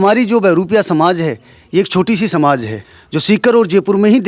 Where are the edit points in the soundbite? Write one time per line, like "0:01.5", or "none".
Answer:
none